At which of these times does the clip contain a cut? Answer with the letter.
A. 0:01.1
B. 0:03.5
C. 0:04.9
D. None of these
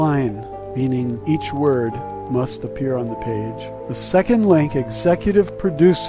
B